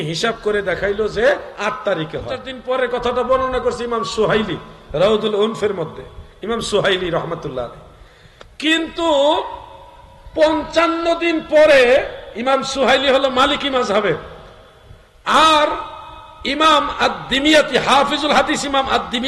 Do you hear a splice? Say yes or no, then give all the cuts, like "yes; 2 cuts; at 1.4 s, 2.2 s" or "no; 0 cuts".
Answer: yes; 1 cut; at 2.5 s